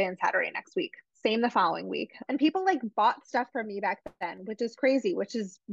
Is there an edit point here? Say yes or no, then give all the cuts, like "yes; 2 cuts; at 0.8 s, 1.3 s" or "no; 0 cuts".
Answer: yes; 1 cut; at 2.2 s